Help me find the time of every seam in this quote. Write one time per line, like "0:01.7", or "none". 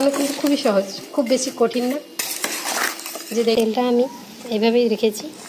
0:03.6